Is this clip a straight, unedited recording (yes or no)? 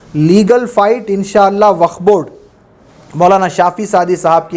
yes